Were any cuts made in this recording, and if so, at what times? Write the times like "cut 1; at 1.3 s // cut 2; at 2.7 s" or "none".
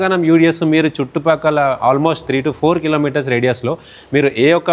none